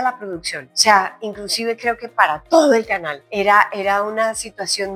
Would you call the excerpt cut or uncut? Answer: uncut